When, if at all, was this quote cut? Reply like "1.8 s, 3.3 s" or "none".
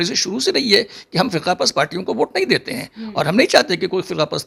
none